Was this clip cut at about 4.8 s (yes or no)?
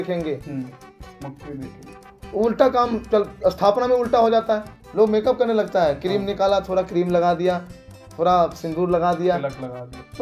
yes